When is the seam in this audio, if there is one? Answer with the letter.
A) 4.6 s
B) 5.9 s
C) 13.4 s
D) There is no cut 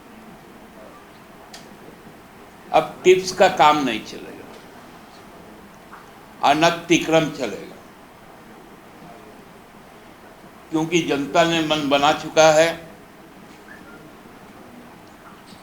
D